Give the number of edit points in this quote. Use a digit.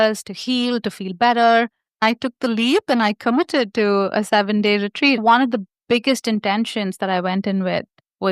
2